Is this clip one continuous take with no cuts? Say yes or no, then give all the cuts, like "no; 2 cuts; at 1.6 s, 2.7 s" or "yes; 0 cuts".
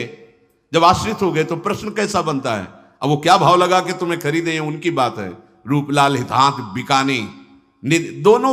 yes; 0 cuts